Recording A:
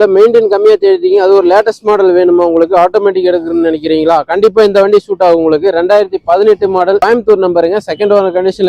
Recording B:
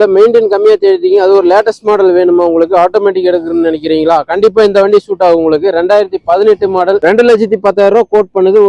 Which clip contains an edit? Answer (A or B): B